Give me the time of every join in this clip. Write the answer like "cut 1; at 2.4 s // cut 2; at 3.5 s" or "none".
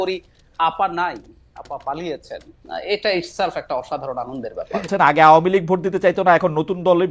cut 1; at 4.9 s